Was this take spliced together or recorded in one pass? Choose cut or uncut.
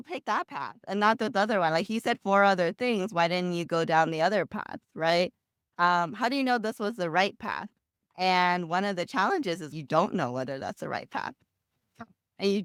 uncut